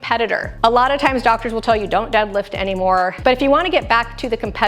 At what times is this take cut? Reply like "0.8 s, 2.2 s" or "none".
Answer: 3.2 s